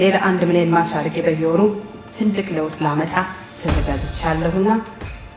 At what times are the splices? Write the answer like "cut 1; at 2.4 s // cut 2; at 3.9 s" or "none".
none